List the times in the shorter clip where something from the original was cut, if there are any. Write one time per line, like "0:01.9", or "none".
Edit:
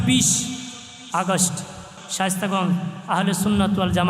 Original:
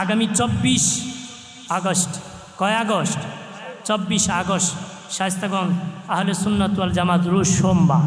0:01.9